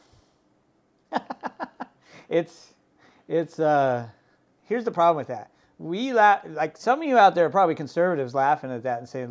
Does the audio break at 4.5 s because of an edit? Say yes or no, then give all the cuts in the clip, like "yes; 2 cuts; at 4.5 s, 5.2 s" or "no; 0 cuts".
yes; 1 cut; at 4.5 s